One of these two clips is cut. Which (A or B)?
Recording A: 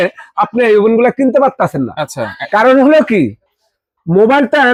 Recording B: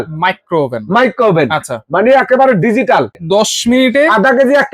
B